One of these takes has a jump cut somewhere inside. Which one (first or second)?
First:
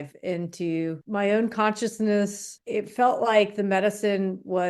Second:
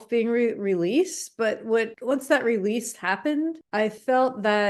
first